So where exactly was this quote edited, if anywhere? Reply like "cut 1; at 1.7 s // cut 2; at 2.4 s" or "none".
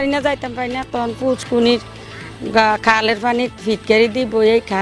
none